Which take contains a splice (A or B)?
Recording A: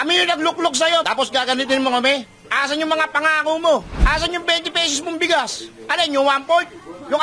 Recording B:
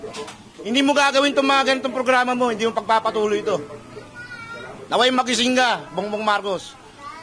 A